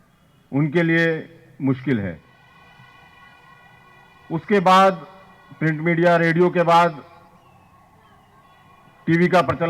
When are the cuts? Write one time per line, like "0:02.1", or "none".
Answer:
0:02.3

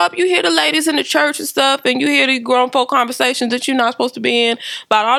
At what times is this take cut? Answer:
none

